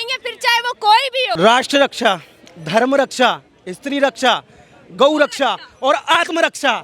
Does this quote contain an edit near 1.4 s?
yes; 1 cut; at 1.4 s

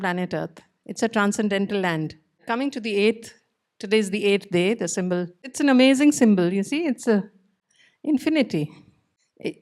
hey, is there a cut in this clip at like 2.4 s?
yes; 2 cuts; at 2.4 s, 5.4 s

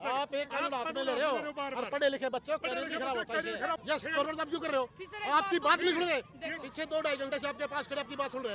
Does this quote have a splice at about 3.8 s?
yes; 1 cut; at 3.8 s

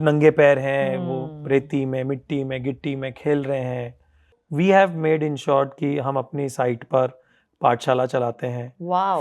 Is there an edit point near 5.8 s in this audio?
no; 1 cut; at 4.4 s

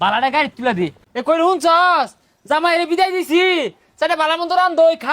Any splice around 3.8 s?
no; 1 cut; at 1.0 s

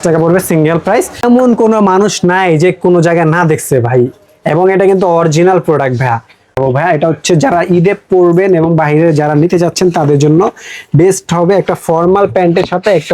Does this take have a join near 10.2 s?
no; 2 cuts; at 1.2 s, 6.5 s

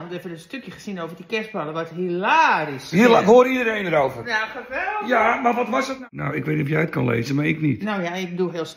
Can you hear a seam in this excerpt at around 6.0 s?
yes; 1 cut; at 6.0 s

